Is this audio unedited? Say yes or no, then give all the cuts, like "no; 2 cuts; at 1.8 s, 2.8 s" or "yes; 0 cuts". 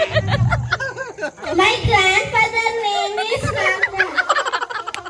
no; 1 cut; at 1.4 s